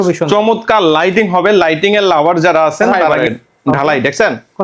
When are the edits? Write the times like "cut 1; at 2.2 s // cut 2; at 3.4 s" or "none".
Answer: cut 1; at 3.1 s